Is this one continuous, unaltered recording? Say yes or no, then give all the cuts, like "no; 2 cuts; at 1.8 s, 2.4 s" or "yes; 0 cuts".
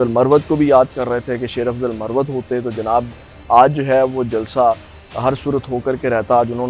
yes; 0 cuts